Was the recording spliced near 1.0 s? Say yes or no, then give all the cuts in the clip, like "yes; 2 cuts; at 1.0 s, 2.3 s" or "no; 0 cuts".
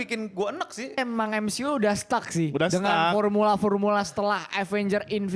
yes; 1 cut; at 1.0 s